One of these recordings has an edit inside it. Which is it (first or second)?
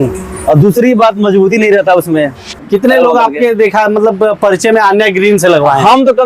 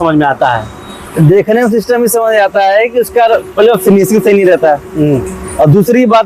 first